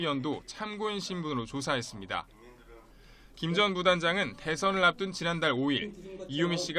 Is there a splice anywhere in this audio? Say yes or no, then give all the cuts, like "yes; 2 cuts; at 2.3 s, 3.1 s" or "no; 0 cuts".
yes; 1 cut; at 3.9 s